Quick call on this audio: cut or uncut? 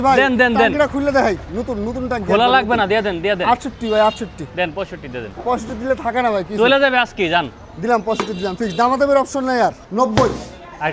cut